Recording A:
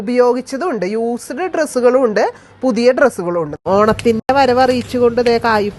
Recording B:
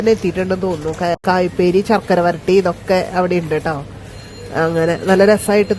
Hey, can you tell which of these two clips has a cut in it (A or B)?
A